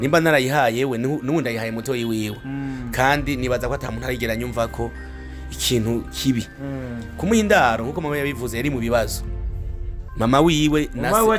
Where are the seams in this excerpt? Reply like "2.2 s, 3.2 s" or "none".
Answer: none